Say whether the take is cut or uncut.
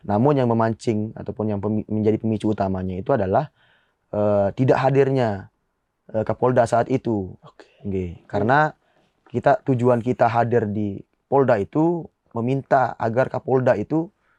uncut